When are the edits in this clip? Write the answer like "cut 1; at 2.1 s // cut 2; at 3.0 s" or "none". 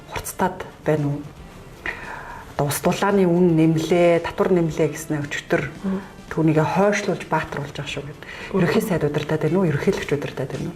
none

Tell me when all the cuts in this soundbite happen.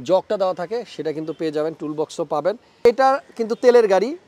cut 1; at 2.8 s

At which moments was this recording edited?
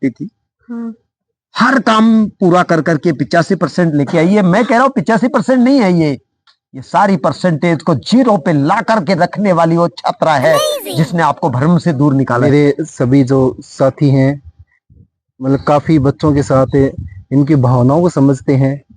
cut 1; at 12.4 s

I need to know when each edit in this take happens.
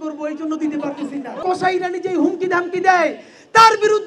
cut 1; at 1.4 s

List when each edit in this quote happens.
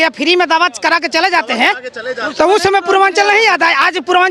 none

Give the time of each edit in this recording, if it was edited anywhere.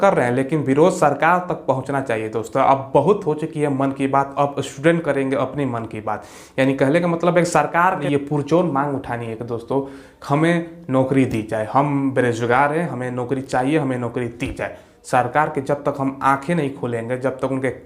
cut 1; at 8.0 s

